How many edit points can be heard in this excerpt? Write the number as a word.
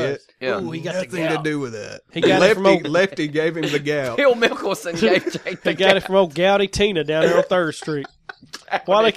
one